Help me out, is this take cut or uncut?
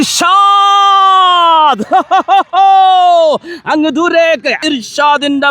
cut